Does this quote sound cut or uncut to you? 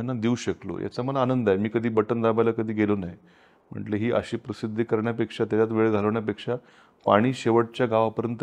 uncut